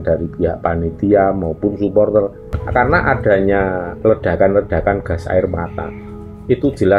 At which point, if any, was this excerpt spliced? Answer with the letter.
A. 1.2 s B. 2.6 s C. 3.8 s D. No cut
B